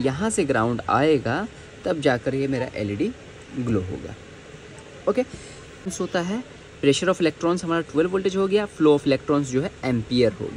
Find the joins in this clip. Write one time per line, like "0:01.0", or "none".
0:05.8